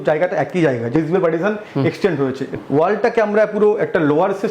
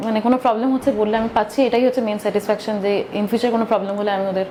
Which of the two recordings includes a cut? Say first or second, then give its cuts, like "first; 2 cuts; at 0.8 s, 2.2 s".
first; 2 cuts; at 0.9 s, 2.5 s